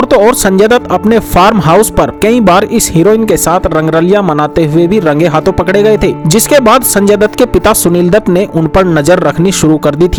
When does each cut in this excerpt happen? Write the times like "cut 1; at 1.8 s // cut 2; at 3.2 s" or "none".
none